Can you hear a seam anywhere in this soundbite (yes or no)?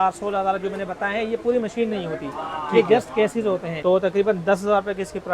yes